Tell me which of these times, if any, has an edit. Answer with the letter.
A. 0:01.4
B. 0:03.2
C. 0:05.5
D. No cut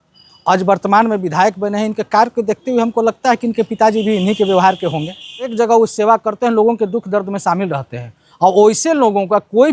C